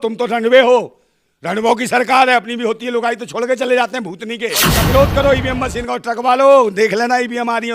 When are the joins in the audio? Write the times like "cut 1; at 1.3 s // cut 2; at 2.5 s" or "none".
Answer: cut 1; at 4.8 s